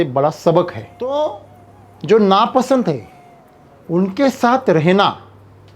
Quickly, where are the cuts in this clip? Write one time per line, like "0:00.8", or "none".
0:01.1